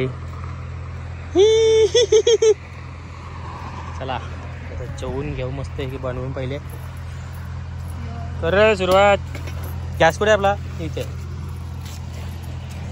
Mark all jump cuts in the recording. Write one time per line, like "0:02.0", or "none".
none